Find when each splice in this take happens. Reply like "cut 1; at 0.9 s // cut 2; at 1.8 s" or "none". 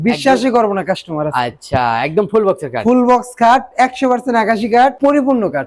none